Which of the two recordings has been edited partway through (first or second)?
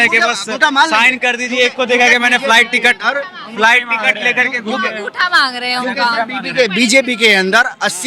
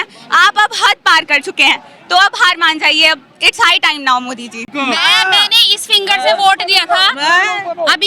second